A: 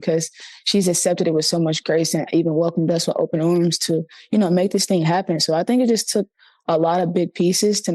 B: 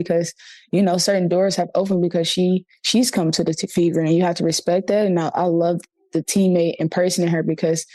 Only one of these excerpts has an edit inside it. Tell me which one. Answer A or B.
B